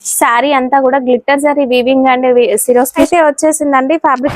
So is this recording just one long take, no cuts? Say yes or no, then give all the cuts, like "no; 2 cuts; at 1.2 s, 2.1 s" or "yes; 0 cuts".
no; 1 cut; at 3.1 s